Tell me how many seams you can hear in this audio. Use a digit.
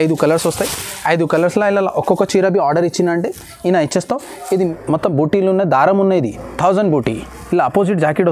1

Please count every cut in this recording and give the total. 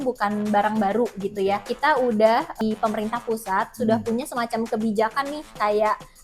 2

